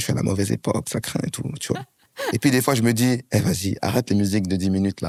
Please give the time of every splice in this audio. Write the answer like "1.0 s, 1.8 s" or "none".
none